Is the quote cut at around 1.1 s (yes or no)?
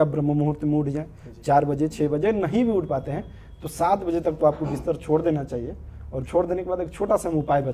no